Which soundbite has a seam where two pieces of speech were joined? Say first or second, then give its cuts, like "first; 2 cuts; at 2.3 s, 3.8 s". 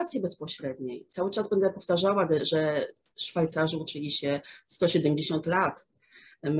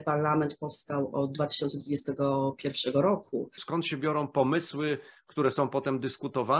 second; 1 cut; at 3.6 s